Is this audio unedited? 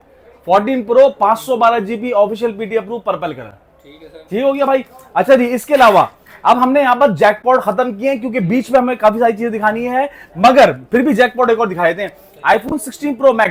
yes; 0 cuts

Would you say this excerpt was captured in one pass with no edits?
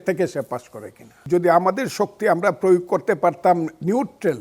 no; 1 cut; at 1.2 s

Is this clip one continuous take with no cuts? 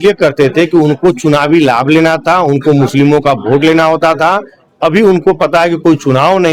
yes; 0 cuts

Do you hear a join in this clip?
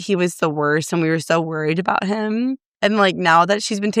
no; 0 cuts

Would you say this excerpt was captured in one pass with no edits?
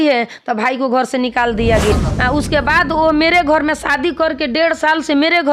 no; 1 cut; at 1.9 s

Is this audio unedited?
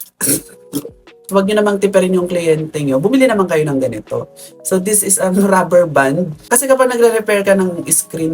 no; 2 cuts; at 1.1 s, 6.3 s

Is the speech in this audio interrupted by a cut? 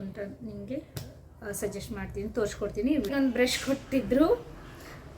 yes; 1 cut; at 3.1 s

